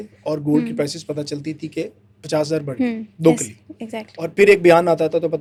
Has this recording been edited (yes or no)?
no